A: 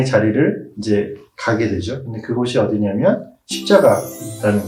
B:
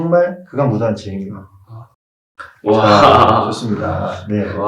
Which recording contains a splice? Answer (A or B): B